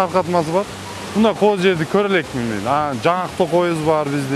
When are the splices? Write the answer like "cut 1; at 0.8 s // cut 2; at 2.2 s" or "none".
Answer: none